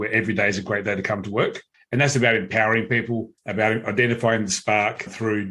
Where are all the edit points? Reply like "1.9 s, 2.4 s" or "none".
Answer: 1.7 s, 3.4 s